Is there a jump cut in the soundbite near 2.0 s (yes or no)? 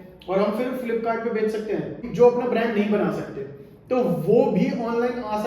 yes